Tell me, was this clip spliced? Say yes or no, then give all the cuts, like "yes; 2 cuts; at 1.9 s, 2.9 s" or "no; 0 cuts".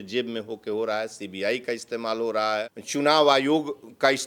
yes; 1 cut; at 2.8 s